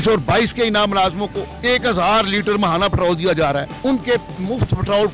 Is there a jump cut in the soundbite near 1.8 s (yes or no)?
no